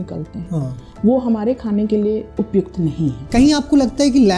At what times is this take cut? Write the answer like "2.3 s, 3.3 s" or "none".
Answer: 2.3 s, 3.3 s